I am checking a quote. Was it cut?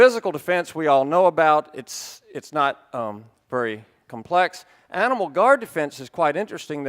yes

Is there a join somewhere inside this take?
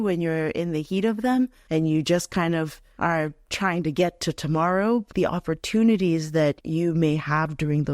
yes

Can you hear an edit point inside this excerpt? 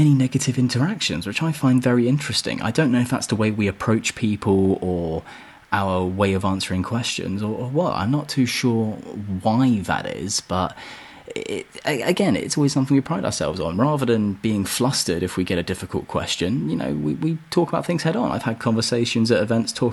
no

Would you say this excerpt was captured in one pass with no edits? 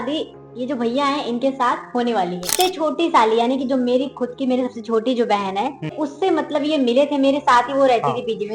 no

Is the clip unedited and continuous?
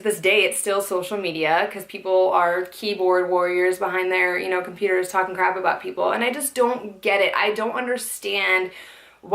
no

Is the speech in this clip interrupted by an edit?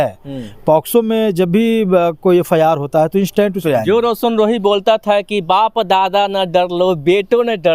yes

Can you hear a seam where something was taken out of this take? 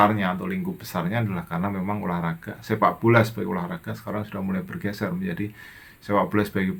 no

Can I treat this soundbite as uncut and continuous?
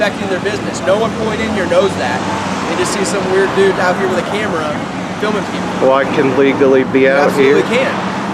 yes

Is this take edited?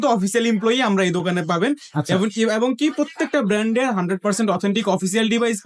no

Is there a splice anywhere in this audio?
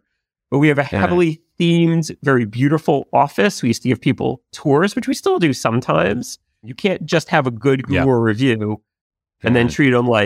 yes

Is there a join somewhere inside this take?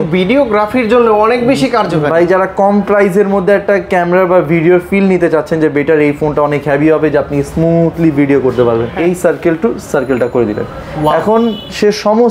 yes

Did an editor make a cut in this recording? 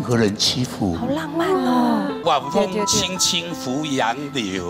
yes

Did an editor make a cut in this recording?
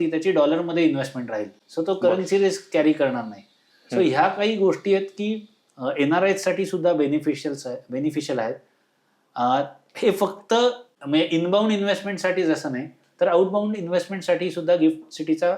no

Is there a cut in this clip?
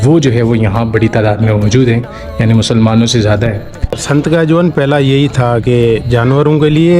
yes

